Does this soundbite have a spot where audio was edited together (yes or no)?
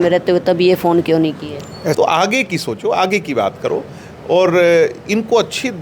yes